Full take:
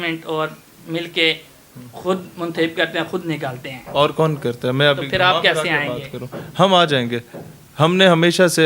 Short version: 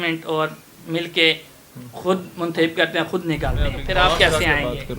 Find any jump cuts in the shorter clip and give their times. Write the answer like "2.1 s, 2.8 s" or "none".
3.8 s